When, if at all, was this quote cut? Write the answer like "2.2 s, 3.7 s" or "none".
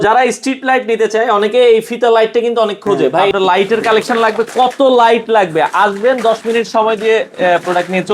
3.3 s